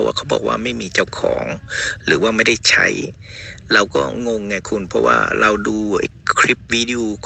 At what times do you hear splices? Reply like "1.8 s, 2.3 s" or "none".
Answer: none